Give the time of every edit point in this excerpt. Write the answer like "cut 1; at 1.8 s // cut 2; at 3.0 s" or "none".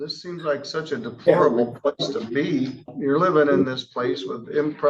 cut 1; at 2.9 s

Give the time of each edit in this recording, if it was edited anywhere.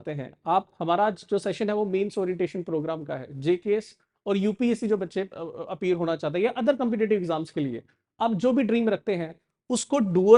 none

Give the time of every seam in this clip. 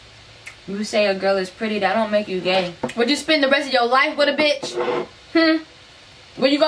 cut 1; at 2.8 s

